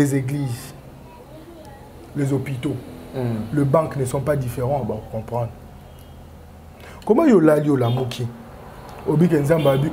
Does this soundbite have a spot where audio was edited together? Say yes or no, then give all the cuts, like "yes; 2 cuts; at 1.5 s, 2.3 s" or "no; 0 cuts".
no; 0 cuts